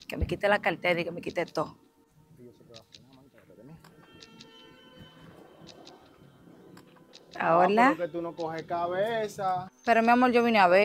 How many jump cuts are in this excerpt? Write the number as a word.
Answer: two